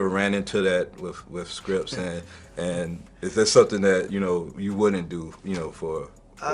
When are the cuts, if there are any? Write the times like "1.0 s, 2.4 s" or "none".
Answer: none